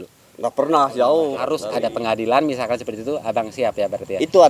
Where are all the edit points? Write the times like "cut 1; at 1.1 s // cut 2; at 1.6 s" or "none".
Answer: cut 1; at 1.4 s